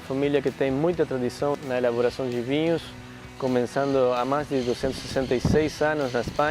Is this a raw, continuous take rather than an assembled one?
no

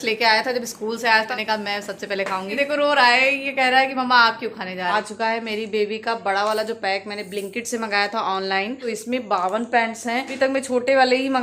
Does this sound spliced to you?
yes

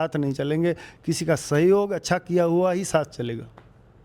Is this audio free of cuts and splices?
yes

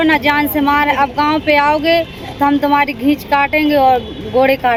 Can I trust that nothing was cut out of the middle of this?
yes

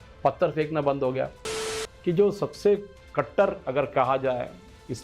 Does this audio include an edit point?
yes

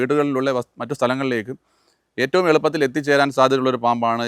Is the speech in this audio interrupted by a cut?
no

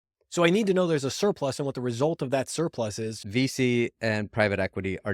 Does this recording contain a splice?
yes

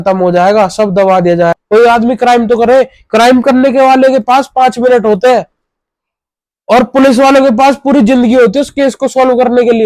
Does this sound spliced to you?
yes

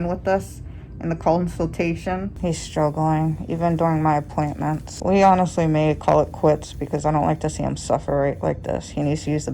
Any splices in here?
yes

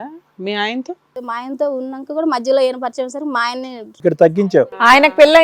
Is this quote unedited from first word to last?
no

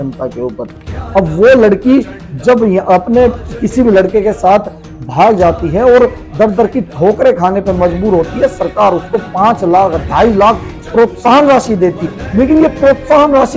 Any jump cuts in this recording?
yes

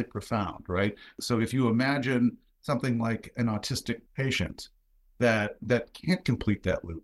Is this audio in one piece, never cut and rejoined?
no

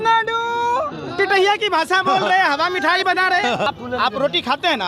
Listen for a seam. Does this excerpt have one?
yes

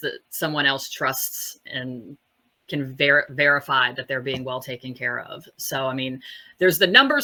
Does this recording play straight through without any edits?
yes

